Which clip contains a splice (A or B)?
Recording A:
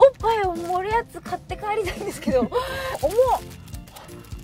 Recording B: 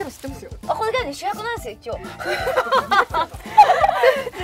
A